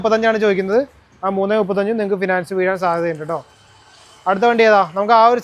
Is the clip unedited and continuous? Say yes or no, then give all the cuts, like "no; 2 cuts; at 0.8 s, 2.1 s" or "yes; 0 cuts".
yes; 0 cuts